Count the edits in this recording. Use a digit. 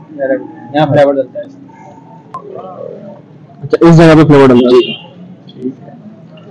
1